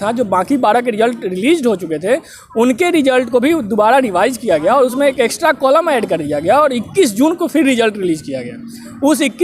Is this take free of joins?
yes; 0 cuts

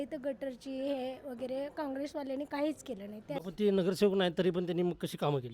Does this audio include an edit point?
yes; 1 cut; at 3.4 s

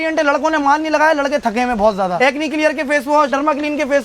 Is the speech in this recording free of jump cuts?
no; 2 cuts; at 2.1 s, 3.3 s

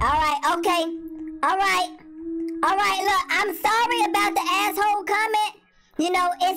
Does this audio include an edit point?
no; 0 cuts

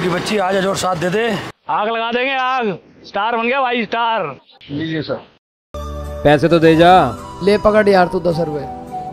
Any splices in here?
yes; 2 cuts; at 1.5 s, 5.8 s

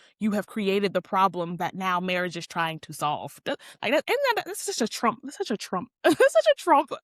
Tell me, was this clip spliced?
no; 0 cuts

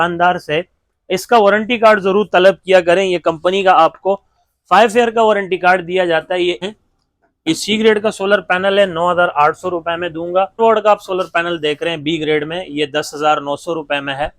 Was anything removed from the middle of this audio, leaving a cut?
yes; 2 cuts; at 6.6 s, 10.6 s

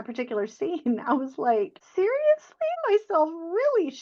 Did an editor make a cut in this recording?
yes; 2 cuts; at 1.8 s, 2.8 s

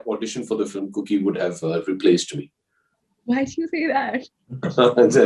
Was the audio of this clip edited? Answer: no; 0 cuts

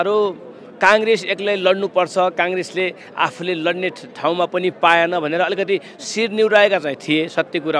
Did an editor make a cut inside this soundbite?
no; 0 cuts

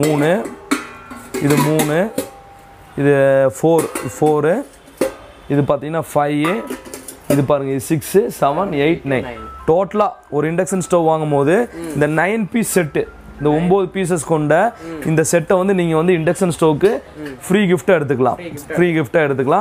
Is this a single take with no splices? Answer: yes; 0 cuts

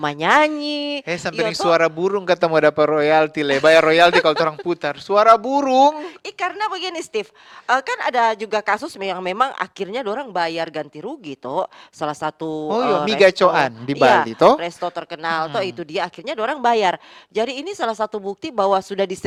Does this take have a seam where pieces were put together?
no; 0 cuts

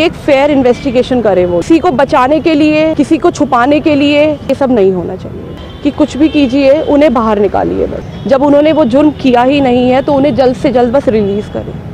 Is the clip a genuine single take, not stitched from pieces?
no; 5 cuts; at 1.6 s, 2.9 s, 4.5 s, 5.5 s, 8.1 s

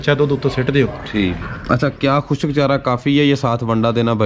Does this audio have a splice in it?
yes; 1 cut; at 1.4 s

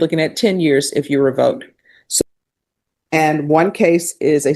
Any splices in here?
yes; 1 cut; at 2.2 s

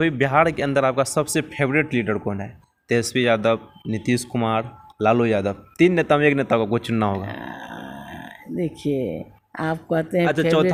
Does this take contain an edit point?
no; 0 cuts

